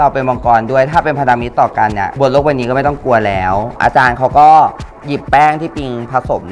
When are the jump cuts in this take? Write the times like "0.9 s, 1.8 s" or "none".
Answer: 3.7 s